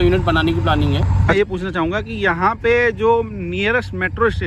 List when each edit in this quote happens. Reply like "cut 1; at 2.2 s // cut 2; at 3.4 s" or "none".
cut 1; at 1.3 s